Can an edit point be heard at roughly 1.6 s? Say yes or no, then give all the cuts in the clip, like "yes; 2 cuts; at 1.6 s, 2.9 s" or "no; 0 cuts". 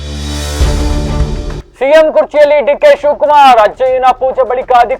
yes; 1 cut; at 1.6 s